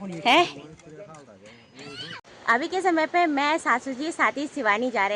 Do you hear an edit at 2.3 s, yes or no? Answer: no